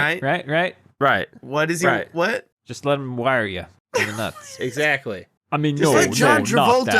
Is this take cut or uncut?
cut